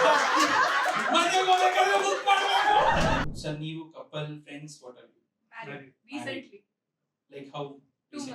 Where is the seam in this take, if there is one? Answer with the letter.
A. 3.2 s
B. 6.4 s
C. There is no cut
A